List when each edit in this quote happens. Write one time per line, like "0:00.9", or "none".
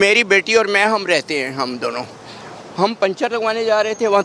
none